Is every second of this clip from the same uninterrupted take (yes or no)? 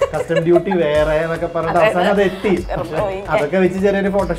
no